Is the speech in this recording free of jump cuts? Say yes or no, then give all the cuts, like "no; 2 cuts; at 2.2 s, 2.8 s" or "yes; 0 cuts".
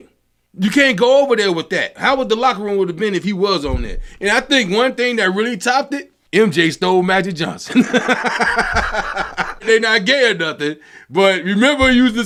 yes; 0 cuts